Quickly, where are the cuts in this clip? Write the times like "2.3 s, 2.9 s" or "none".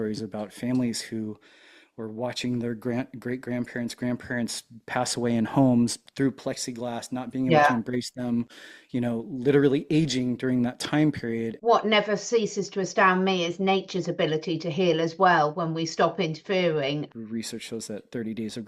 11.5 s, 17.1 s